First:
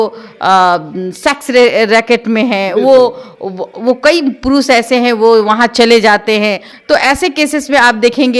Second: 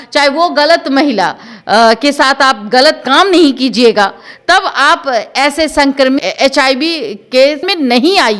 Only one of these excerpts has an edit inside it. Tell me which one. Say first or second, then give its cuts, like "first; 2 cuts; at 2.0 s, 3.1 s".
first; 1 cut; at 6.7 s